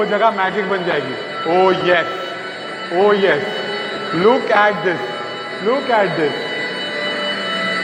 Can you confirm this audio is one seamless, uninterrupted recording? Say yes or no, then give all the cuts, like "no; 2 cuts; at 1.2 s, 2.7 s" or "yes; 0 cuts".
yes; 0 cuts